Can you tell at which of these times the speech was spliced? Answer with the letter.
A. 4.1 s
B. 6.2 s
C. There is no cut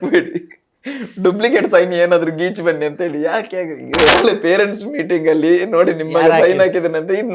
A